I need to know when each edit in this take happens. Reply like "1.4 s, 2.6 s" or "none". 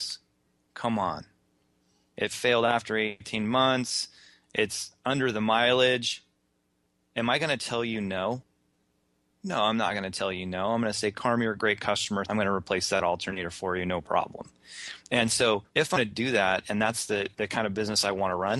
12.3 s

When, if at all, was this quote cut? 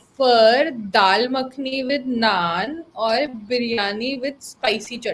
none

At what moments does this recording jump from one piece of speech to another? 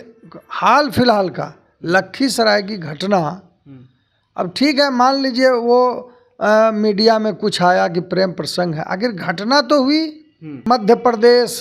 10.6 s

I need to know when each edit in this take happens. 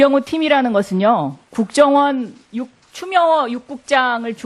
2.9 s

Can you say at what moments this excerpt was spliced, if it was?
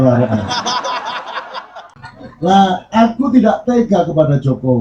1.9 s

